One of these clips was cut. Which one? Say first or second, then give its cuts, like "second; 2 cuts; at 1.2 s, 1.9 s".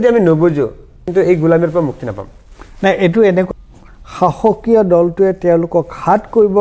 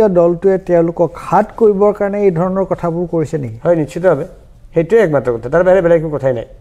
first; 2 cuts; at 1.1 s, 3.5 s